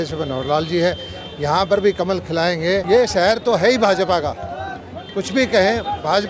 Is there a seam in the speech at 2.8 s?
yes; 1 cut; at 2.8 s

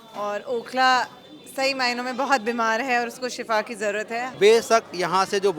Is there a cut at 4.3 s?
yes; 1 cut; at 4.3 s

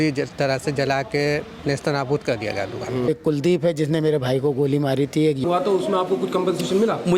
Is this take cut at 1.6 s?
no; 2 cuts; at 3.1 s, 5.4 s

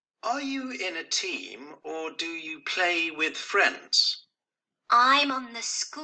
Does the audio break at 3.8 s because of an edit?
no; 0 cuts

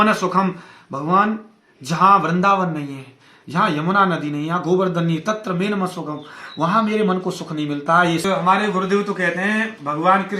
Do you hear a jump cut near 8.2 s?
yes; 1 cut; at 8.2 s

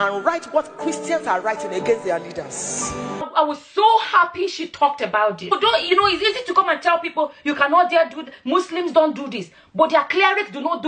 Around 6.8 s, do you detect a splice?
no; 2 cuts; at 3.2 s, 5.5 s

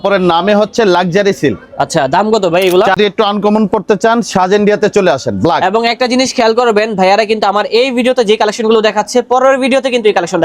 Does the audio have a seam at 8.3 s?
no; 1 cut; at 3.0 s

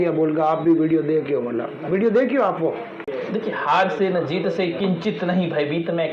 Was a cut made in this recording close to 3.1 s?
yes; 1 cut; at 3.1 s

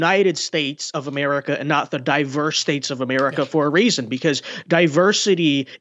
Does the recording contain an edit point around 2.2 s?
no; 0 cuts

